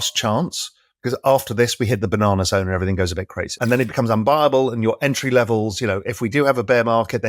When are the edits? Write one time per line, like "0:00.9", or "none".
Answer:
0:03.6